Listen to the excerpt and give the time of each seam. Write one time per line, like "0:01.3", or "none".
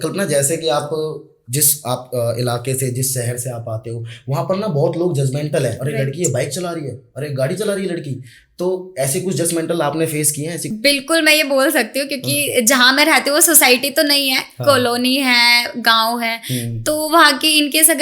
0:05.8
0:10.6